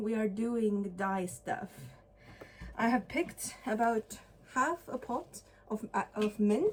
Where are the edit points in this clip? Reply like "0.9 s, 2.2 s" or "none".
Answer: none